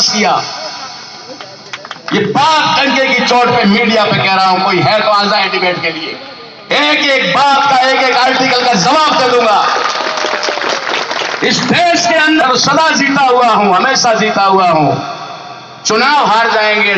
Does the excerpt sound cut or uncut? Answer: cut